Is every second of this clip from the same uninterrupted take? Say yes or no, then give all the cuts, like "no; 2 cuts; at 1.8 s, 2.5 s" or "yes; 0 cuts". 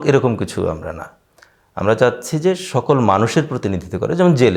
yes; 0 cuts